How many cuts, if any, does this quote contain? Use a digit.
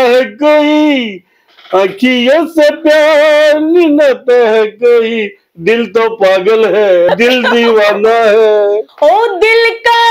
2